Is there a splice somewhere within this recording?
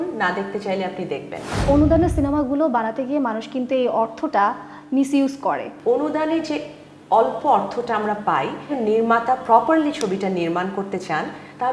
yes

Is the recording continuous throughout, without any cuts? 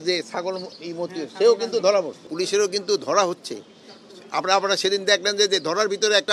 no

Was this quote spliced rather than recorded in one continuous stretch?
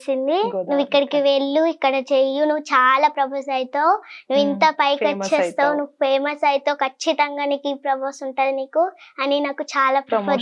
no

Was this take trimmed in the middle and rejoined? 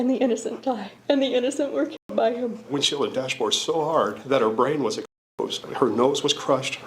yes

